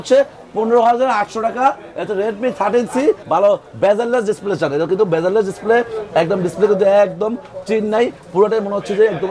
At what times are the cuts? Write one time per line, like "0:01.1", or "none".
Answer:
0:03.2